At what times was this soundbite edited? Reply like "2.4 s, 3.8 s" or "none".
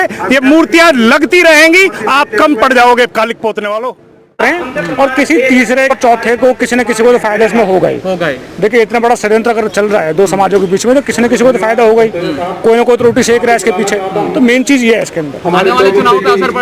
4.4 s, 6.0 s

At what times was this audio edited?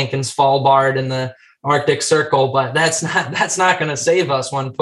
none

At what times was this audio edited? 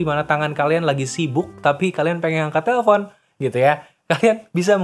none

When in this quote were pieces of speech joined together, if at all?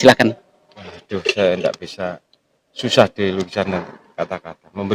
none

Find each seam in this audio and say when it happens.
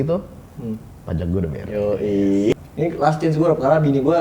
2.5 s

